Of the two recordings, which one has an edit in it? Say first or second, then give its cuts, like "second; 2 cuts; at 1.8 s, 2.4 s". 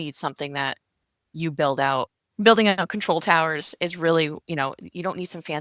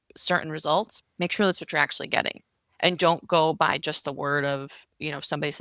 first; 1 cut; at 2.2 s